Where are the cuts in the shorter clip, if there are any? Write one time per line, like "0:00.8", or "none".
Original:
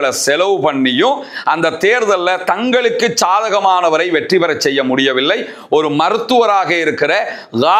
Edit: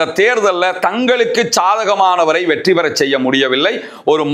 none